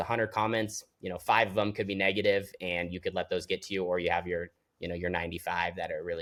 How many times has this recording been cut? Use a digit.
0